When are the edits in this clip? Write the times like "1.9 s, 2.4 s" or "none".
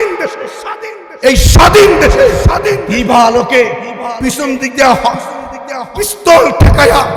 none